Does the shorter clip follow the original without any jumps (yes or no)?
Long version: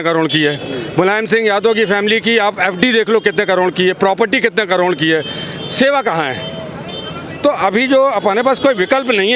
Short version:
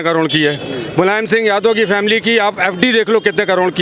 yes